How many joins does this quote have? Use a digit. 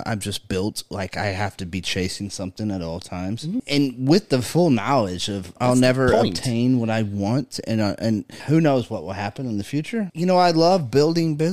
4